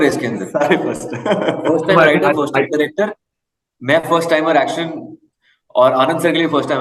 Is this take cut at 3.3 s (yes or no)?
no